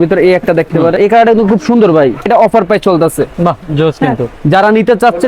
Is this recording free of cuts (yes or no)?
no